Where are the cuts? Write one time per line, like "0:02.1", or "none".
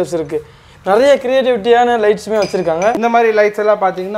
0:03.0